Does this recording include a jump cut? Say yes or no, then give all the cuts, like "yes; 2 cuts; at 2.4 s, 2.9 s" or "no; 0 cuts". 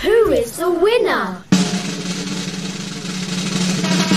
yes; 1 cut; at 1.4 s